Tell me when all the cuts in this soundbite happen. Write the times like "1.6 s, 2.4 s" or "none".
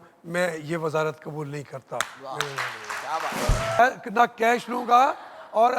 3.8 s